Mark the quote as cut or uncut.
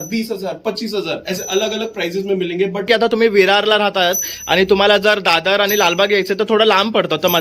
cut